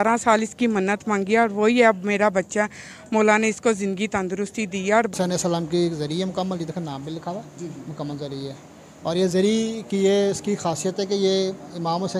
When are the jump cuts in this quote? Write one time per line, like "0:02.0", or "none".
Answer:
0:05.1